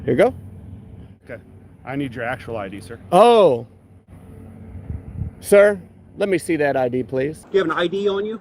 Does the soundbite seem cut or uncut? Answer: cut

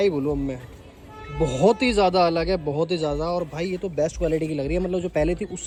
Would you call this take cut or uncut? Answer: uncut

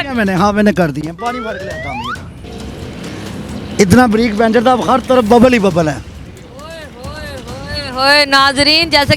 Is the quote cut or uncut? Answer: cut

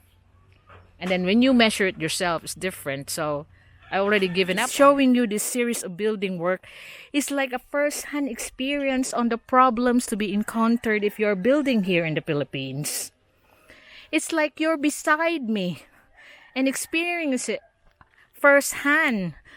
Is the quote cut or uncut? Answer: cut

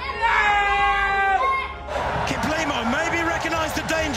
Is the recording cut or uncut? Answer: cut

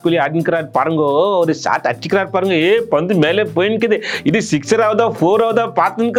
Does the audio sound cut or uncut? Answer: uncut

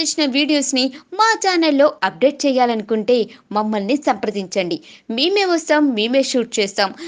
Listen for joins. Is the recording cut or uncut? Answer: uncut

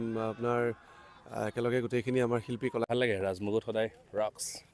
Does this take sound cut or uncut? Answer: cut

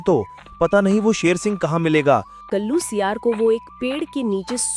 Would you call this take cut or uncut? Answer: cut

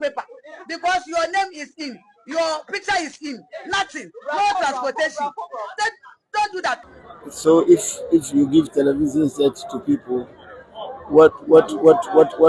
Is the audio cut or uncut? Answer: cut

